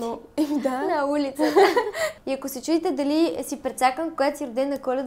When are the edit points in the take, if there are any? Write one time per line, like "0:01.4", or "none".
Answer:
0:02.2

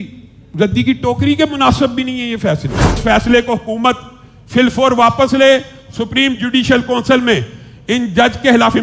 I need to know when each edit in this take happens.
0:03.0

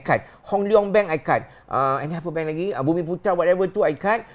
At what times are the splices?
none

